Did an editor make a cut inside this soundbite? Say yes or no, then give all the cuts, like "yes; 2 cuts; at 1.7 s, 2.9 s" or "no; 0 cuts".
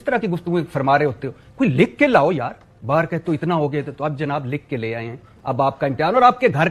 no; 0 cuts